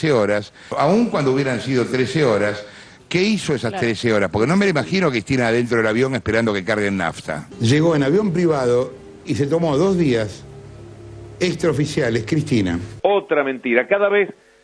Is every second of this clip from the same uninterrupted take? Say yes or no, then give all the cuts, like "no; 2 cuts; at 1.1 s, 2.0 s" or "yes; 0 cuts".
yes; 0 cuts